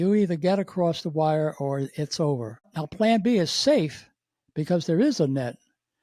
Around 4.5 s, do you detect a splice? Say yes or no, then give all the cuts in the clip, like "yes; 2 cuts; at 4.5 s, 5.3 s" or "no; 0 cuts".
no; 1 cut; at 2.8 s